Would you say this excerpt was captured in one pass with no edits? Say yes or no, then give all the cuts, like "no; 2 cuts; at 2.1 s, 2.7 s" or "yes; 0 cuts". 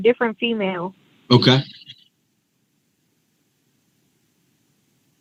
yes; 0 cuts